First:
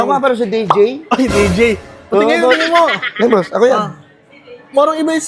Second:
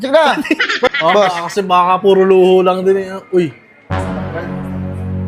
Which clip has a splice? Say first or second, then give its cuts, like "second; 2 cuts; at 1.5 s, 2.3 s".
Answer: second; 1 cut; at 0.9 s